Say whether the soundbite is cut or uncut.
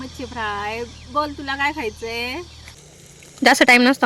cut